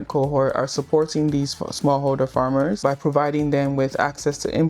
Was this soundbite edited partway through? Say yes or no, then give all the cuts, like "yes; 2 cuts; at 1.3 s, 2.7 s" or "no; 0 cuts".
yes; 1 cut; at 2.8 s